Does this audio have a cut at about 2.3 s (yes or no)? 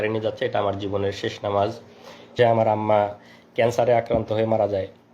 yes